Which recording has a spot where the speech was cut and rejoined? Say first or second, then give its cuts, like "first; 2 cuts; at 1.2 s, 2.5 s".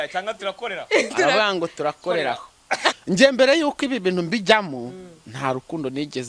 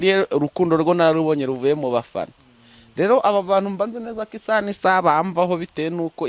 first; 1 cut; at 2.9 s